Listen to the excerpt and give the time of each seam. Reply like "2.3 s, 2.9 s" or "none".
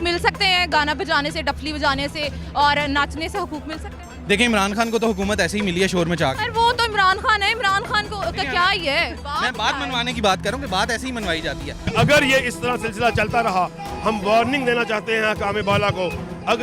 11.8 s